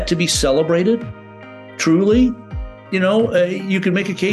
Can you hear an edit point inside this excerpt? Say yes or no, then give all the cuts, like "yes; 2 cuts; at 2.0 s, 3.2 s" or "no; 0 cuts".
no; 0 cuts